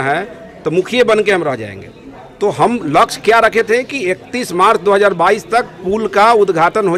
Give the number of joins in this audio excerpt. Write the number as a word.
zero